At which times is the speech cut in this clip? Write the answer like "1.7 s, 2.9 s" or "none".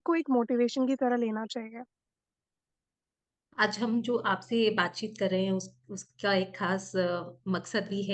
none